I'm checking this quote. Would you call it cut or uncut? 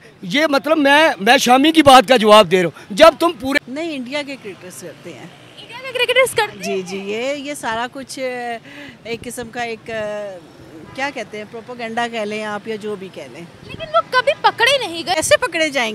cut